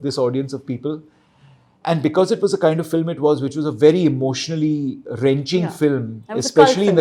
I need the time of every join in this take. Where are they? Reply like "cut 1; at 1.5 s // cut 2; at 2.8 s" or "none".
none